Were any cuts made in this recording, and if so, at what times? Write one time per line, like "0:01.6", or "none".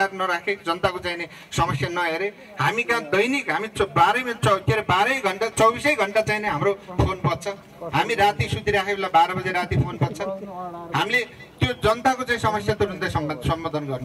none